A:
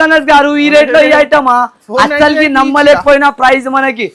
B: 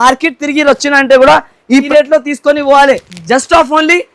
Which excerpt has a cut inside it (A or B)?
B